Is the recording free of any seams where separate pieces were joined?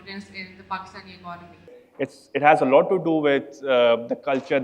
no; 1 cut; at 1.8 s

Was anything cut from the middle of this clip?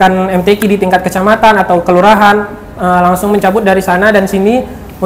no; 0 cuts

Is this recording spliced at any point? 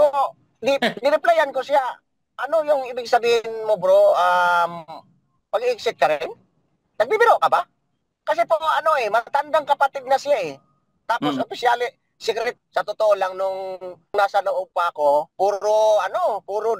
yes; 3 cuts; at 12.6 s, 14.1 s, 15.3 s

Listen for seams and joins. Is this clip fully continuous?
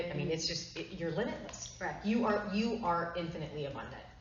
yes; 0 cuts

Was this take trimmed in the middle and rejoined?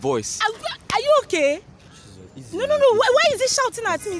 no; 0 cuts

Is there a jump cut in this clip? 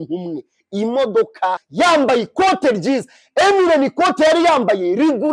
yes; 1 cut; at 1.6 s

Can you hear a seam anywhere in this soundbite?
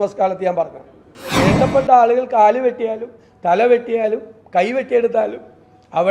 yes; 1 cut; at 1.3 s

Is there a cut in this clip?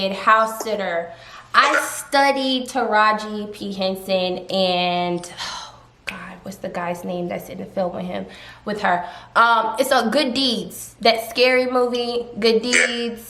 no; 0 cuts

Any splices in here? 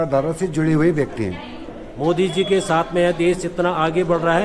yes; 1 cut; at 1.8 s

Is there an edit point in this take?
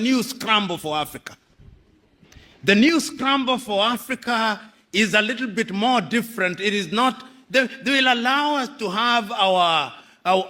no; 0 cuts

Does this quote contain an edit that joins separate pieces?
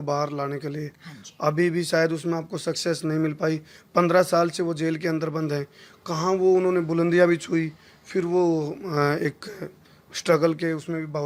no; 0 cuts

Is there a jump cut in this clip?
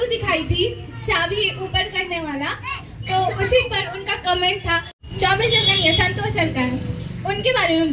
yes; 1 cut; at 5.0 s

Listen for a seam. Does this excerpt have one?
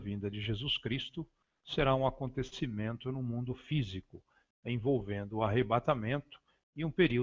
yes; 1 cut; at 1.7 s

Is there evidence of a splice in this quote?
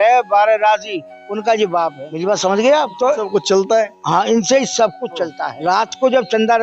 yes; 3 cuts; at 2.0 s, 2.9 s, 5.5 s

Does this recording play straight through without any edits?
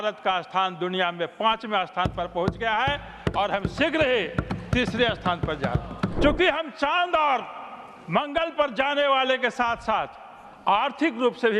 no; 1 cut; at 6.1 s

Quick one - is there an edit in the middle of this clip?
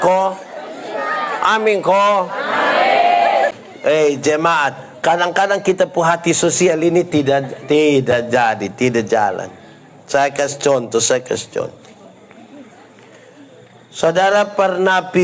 yes; 1 cut; at 3.5 s

